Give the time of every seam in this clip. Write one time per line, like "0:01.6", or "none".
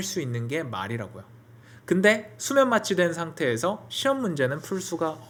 none